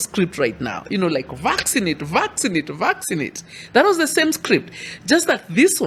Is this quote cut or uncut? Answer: uncut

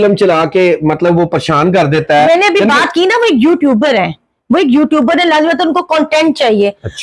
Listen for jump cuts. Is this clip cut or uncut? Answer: uncut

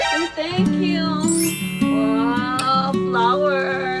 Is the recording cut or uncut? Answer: uncut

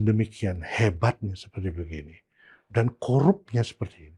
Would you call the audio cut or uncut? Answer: uncut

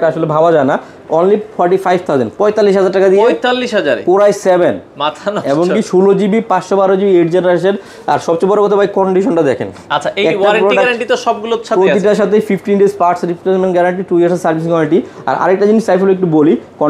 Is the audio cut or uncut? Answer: uncut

